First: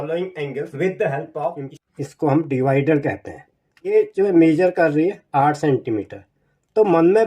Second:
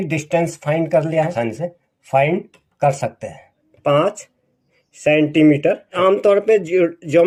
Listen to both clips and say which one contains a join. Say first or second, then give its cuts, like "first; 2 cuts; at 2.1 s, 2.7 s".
first; 2 cuts; at 1.7 s, 3.9 s